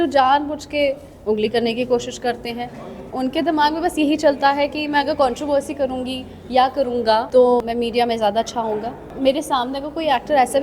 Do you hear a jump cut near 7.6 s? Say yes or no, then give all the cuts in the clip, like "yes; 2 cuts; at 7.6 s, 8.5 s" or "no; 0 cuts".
yes; 3 cuts; at 3.0 s, 7.6 s, 9.0 s